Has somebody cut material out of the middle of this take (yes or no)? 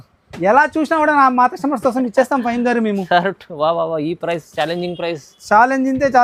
no